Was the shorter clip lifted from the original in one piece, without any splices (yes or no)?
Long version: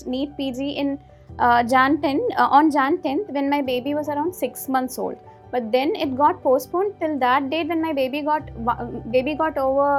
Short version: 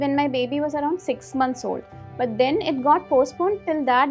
yes